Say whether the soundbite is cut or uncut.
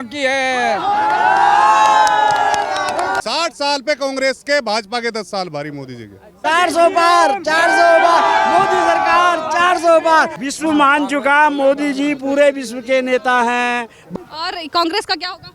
cut